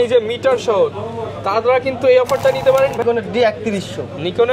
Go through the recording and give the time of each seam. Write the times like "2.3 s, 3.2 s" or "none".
3.0 s